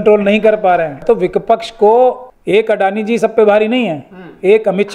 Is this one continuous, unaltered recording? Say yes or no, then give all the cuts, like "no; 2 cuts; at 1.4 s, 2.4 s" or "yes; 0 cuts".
no; 2 cuts; at 1.0 s, 2.3 s